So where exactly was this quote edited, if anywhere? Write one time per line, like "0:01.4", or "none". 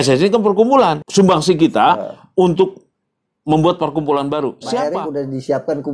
0:01.0
0:04.8